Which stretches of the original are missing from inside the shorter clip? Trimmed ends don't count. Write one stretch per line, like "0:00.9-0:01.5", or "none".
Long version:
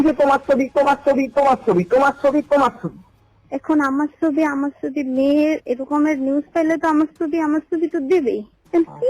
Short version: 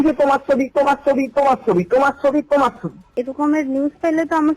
0:03.1-0:05.7